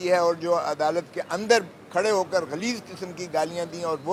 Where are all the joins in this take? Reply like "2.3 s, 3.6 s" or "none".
none